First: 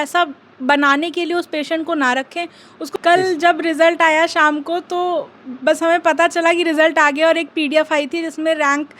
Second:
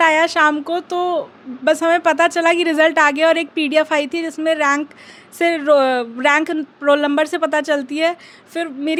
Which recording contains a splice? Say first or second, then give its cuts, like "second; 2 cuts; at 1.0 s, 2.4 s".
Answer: first; 1 cut; at 2.9 s